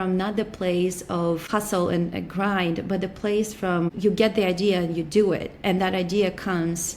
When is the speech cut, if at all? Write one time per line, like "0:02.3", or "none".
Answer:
0:04.0